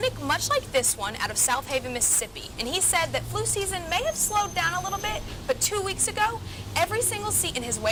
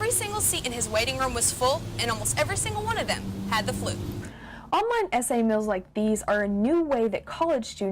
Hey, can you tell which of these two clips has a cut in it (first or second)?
second